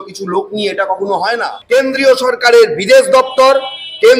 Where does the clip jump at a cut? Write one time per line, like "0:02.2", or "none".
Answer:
0:01.5